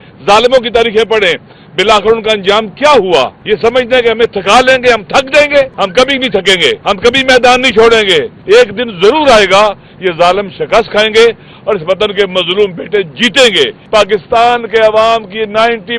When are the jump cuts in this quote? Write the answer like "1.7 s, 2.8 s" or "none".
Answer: 3.4 s, 5.7 s, 6.8 s, 8.3 s, 13.8 s